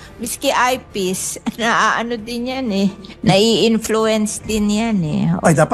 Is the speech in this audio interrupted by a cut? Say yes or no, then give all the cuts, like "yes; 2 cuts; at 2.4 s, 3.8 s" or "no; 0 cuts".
no; 0 cuts